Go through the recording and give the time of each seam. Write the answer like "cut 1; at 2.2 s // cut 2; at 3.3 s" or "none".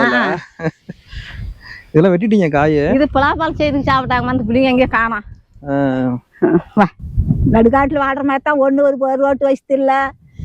cut 1; at 7.0 s